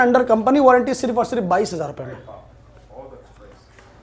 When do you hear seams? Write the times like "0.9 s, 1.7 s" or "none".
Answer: none